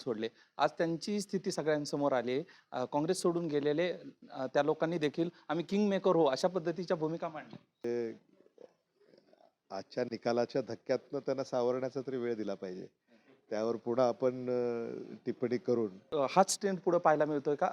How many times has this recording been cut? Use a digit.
2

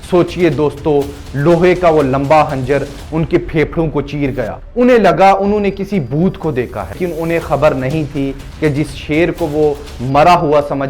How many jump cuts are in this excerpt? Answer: 2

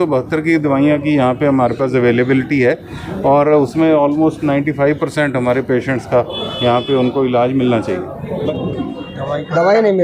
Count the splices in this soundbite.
1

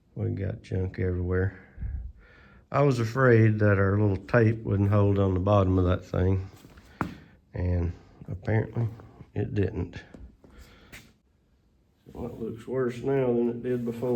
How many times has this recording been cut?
1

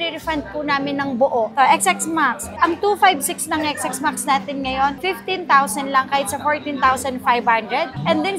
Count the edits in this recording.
0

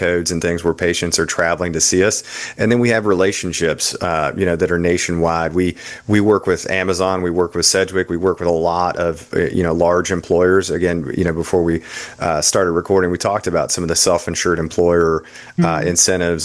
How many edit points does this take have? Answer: 0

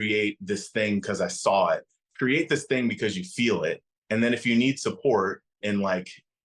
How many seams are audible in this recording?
1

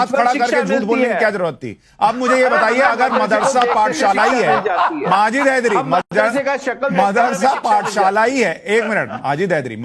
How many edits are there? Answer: 0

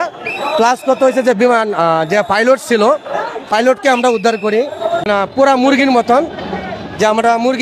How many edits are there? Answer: 1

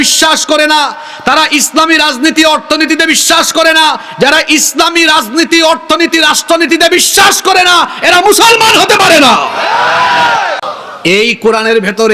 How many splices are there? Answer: 1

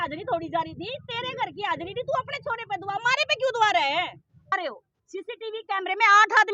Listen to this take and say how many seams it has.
1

